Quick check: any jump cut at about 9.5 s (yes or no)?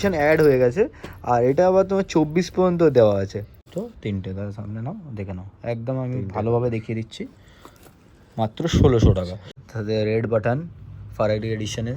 yes